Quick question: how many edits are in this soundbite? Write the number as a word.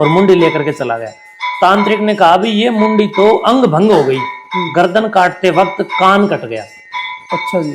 zero